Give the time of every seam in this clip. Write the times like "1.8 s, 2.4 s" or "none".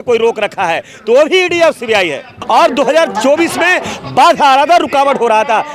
2.3 s